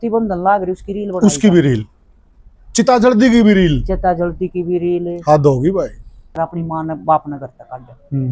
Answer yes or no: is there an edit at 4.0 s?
no